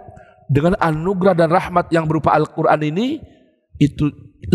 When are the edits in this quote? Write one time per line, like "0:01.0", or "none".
none